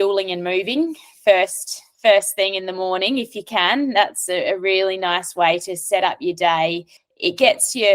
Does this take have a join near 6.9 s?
yes; 1 cut; at 6.9 s

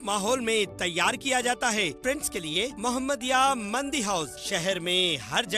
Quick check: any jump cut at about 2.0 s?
yes; 1 cut; at 2.0 s

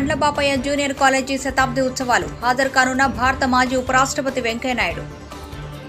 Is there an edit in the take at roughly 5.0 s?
yes; 1 cut; at 5.0 s

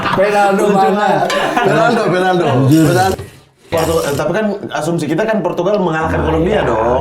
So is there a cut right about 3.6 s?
yes; 1 cut; at 3.6 s

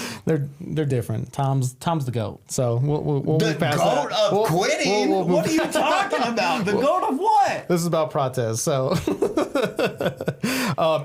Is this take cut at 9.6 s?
no; 0 cuts

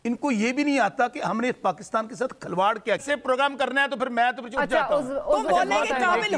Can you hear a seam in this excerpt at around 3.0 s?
yes; 1 cut; at 3.0 s

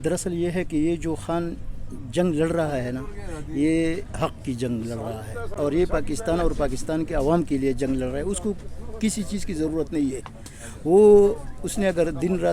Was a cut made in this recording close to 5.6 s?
no; 0 cuts

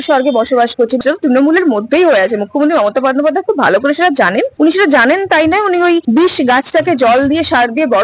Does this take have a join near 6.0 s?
yes; 3 cuts; at 1.0 s, 4.5 s, 6.0 s

